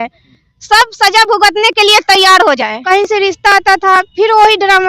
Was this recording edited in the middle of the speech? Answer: yes; 1 cut; at 2.8 s

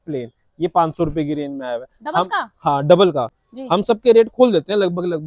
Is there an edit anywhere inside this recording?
no; 0 cuts

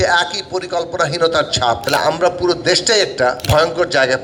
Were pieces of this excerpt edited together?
yes; 2 cuts; at 1.8 s, 3.4 s

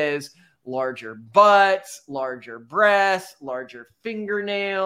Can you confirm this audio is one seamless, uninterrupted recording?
yes; 0 cuts

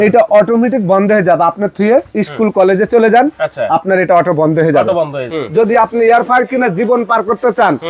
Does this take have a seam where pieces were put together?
yes; 1 cut; at 5.3 s

